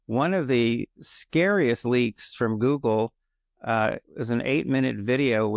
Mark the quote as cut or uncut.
uncut